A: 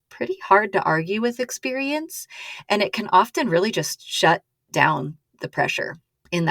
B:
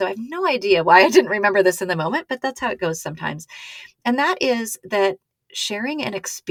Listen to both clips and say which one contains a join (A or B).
A